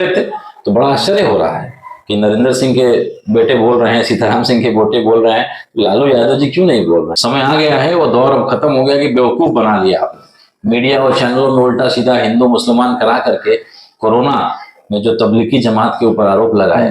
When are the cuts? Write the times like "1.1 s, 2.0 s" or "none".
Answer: 7.1 s